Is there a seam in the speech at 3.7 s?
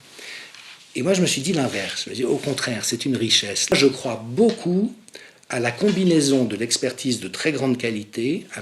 yes; 1 cut; at 3.7 s

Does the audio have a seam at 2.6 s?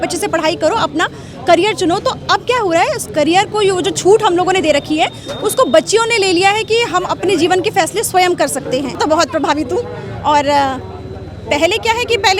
no; 1 cut; at 9.0 s

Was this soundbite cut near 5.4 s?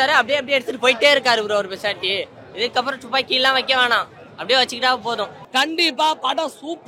yes; 1 cut; at 5.4 s

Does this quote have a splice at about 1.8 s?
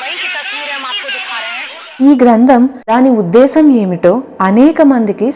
yes; 2 cuts; at 1.8 s, 2.8 s

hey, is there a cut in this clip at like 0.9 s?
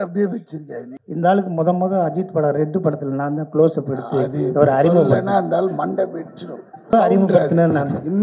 yes; 2 cuts; at 0.9 s, 6.9 s

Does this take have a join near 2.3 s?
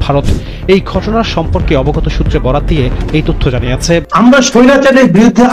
no; 1 cut; at 4.1 s

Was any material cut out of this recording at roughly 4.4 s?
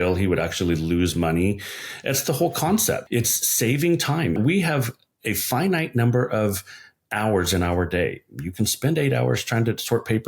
yes; 2 cuts; at 3.0 s, 4.4 s

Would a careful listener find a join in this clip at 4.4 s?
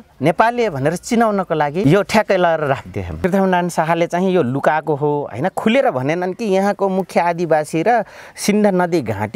no; 2 cuts; at 1.8 s, 3.1 s

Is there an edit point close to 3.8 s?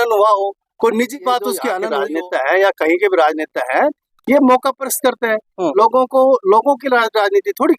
no; 1 cut; at 1.8 s

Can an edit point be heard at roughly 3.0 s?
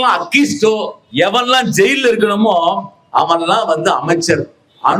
no; 1 cut; at 1.0 s

